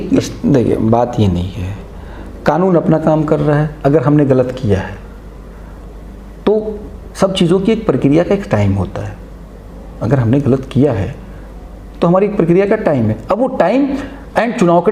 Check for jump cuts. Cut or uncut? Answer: uncut